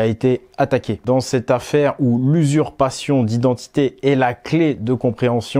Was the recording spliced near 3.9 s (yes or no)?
no